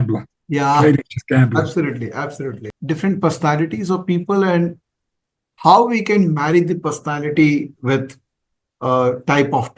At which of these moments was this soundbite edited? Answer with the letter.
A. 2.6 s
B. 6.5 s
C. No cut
A